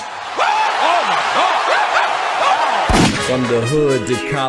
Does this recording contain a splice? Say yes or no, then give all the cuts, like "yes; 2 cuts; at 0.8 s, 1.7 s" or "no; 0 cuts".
yes; 1 cut; at 3.1 s